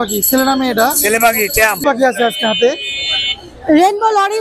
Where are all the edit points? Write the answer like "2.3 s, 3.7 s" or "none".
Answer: 1.8 s